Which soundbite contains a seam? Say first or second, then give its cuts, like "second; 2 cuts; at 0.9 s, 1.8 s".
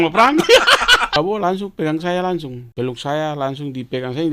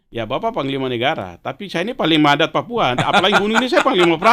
first; 2 cuts; at 1.2 s, 2.6 s